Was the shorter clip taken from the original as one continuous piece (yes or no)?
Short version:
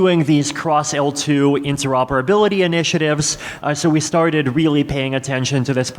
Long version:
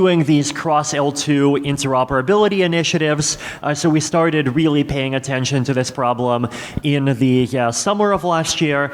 yes